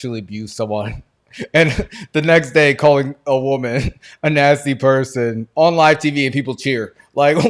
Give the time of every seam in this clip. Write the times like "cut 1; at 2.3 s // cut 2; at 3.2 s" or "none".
none